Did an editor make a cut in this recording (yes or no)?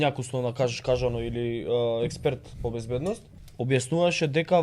yes